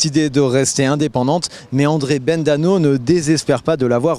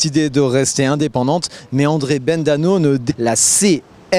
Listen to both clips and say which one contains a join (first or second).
first